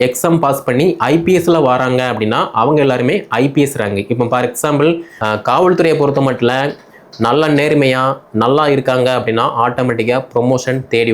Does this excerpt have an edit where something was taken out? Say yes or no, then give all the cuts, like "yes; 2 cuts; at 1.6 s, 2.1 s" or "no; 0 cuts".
yes; 1 cut; at 5.1 s